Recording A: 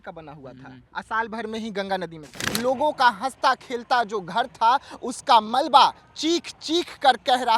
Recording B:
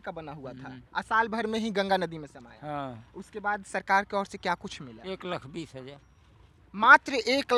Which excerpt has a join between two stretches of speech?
A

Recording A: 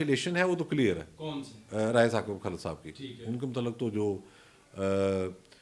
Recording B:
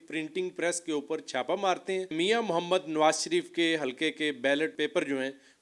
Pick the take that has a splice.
B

